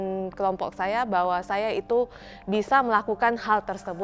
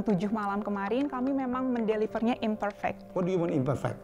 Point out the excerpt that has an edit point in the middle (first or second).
second